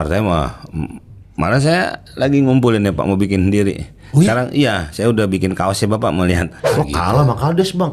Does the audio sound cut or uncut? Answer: cut